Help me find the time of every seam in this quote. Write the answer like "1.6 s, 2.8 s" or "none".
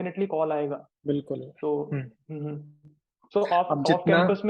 none